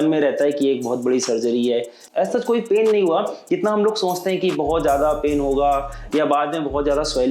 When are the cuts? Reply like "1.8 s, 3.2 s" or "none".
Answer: 2.0 s

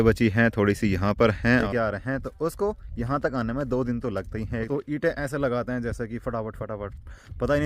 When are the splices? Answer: 1.7 s, 4.7 s

